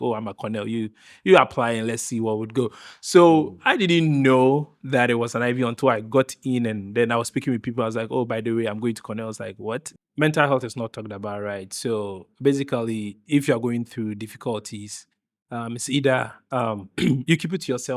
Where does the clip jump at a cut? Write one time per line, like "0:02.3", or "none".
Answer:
0:10.0